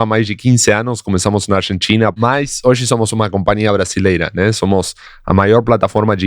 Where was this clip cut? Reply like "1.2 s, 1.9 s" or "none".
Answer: 2.1 s